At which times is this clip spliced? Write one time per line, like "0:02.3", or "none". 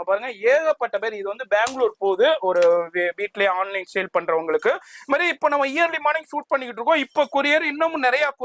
none

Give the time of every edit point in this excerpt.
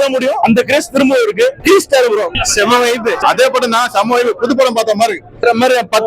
0:02.3

